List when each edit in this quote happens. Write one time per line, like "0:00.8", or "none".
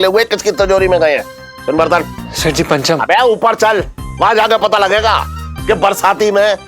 none